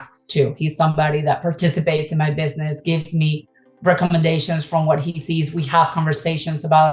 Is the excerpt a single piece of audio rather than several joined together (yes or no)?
yes